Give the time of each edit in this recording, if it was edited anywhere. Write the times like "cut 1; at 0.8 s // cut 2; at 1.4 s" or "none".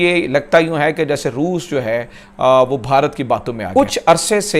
none